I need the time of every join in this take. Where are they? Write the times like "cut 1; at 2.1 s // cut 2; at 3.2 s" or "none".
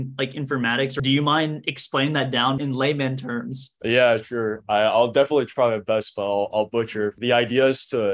cut 1; at 1.0 s // cut 2; at 2.6 s // cut 3; at 3.7 s // cut 4; at 7.2 s